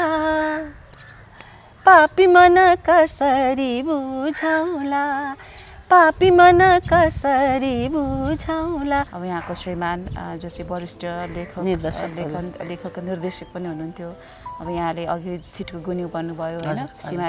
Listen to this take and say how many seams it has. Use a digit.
1